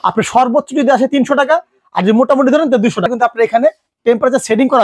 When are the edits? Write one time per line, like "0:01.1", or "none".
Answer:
0:03.1